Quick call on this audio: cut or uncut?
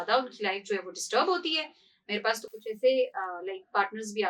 uncut